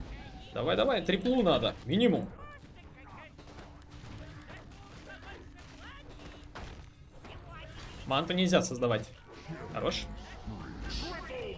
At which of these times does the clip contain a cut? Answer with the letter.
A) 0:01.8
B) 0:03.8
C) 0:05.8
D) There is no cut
A